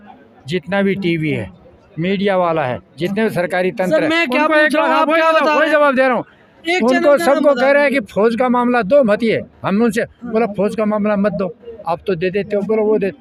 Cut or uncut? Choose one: uncut